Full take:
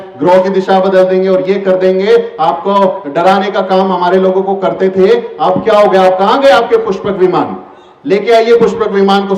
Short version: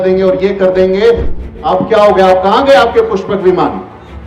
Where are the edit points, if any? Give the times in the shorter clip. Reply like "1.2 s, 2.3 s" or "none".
1.5 s